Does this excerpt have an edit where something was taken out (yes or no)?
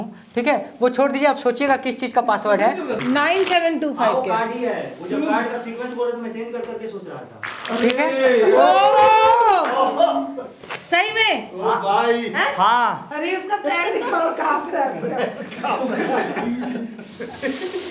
yes